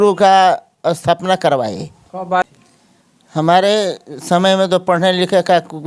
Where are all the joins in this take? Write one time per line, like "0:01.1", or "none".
0:02.4